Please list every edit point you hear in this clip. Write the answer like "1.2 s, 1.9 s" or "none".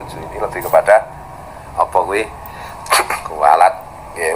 none